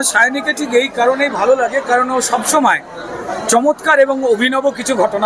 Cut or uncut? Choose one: uncut